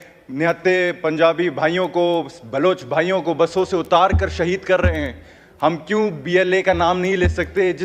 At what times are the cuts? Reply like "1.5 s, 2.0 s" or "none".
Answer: none

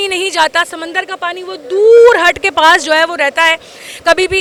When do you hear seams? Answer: none

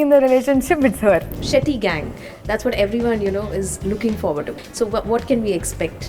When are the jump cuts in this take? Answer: 1.4 s, 4.5 s

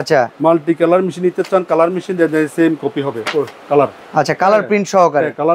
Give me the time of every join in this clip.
4.0 s

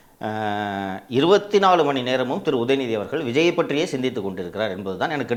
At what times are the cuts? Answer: none

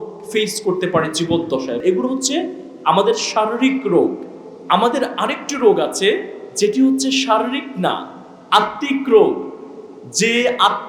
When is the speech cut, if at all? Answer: 1.8 s

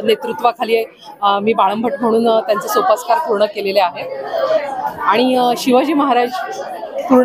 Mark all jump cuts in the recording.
none

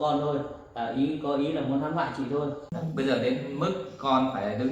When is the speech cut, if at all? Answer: 2.7 s

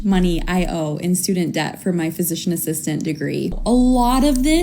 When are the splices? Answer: 3.5 s

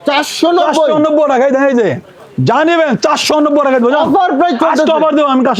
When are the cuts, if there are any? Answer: none

